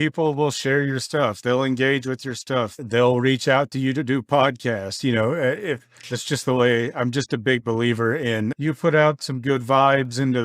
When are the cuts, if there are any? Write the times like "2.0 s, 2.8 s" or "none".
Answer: 2.8 s